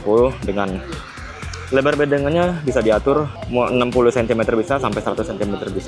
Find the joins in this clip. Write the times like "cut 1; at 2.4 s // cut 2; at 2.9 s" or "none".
cut 1; at 3.4 s

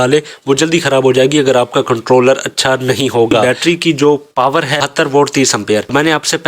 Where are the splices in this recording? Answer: cut 1; at 3.4 s

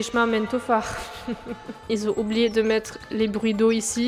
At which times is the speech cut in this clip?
cut 1; at 1.8 s

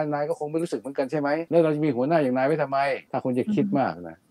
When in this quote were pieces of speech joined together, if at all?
cut 1; at 1.5 s // cut 2; at 3.1 s

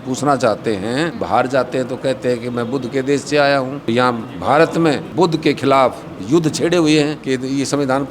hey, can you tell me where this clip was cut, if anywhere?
cut 1; at 1.2 s // cut 2; at 3.9 s // cut 3; at 5.1 s // cut 4; at 7.2 s

